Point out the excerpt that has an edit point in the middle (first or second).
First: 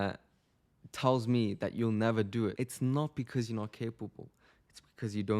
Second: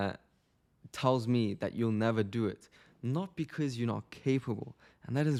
first